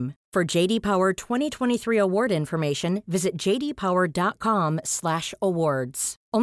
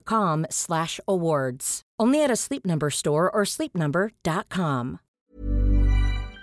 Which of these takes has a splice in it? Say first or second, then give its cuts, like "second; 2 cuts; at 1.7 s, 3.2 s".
second; 1 cut; at 5.2 s